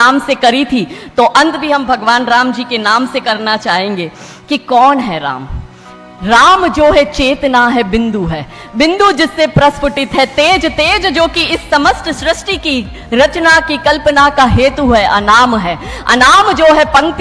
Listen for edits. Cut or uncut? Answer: uncut